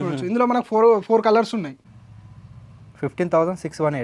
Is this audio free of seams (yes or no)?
no